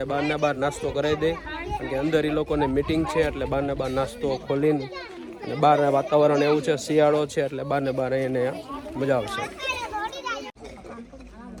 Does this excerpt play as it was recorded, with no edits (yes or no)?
yes